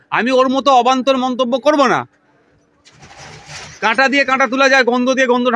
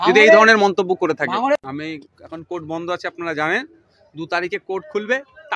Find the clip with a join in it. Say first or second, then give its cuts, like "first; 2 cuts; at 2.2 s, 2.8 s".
second; 1 cut; at 1.6 s